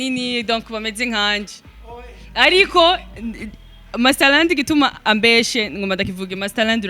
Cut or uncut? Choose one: uncut